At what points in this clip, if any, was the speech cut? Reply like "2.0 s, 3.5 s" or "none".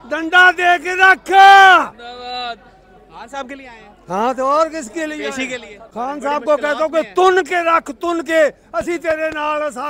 5.8 s

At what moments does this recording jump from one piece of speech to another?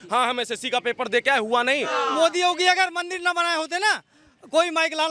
1.9 s

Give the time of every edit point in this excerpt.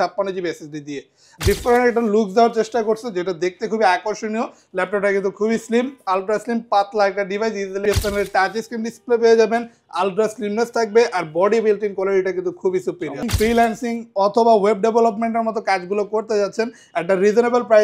1.2 s, 7.8 s, 13.3 s

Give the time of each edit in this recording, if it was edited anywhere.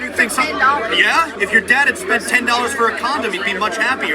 1.3 s

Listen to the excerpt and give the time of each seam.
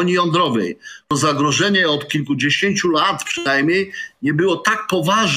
0.9 s

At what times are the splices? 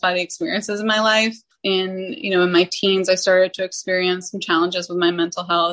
1.5 s

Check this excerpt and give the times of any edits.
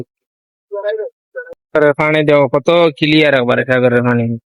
1.6 s

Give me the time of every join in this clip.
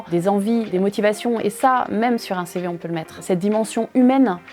3.2 s

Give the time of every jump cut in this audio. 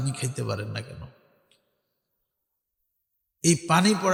none

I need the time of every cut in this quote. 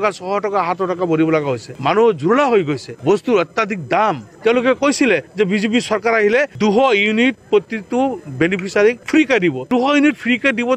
none

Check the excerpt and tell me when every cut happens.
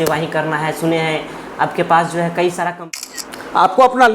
2.7 s

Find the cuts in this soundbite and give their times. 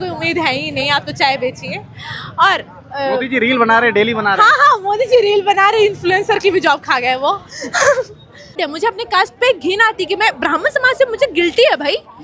8.6 s

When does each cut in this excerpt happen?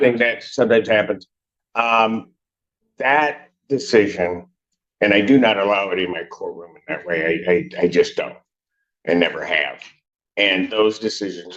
none

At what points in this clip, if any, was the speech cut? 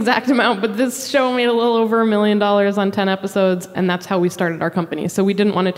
3.7 s

